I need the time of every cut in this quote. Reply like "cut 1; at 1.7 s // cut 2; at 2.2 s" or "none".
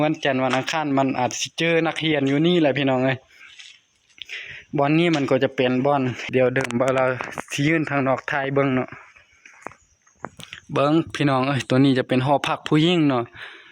cut 1; at 6.2 s